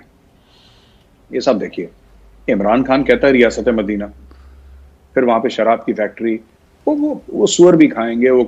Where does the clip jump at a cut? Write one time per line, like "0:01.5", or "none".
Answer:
none